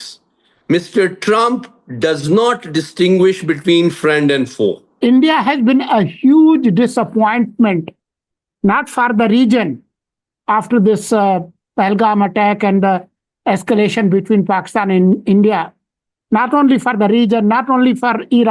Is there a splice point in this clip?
yes; 1 cut; at 4.9 s

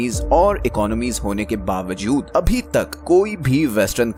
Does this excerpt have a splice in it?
no; 0 cuts

